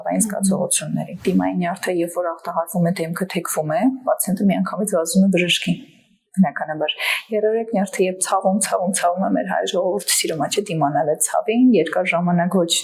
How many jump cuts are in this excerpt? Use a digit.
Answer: 1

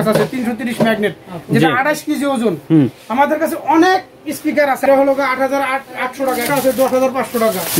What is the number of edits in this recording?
2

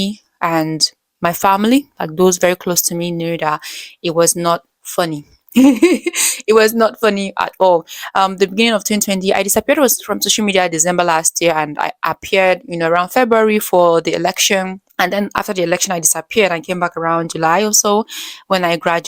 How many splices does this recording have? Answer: 1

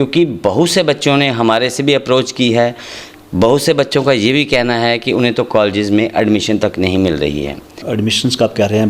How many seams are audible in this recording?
1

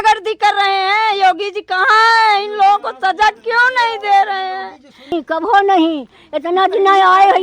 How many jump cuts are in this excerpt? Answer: 1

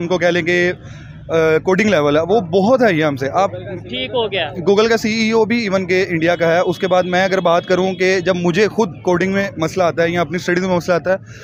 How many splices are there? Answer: 0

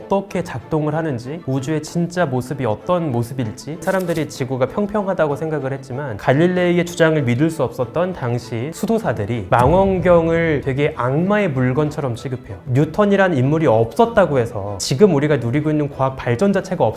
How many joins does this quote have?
3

